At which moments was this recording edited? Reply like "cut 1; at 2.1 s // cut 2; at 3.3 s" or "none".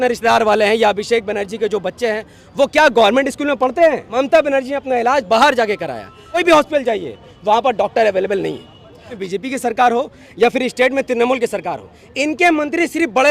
cut 1; at 4.0 s // cut 2; at 6.4 s // cut 3; at 9.2 s